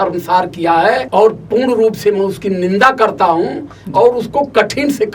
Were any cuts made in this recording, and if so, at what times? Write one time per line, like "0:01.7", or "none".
0:01.0